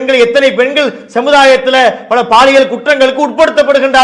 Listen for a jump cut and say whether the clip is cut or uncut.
uncut